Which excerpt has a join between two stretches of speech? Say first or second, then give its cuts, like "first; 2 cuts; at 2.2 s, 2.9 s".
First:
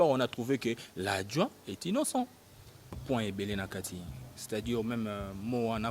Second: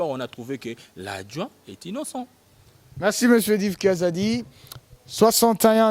first; 1 cut; at 3.0 s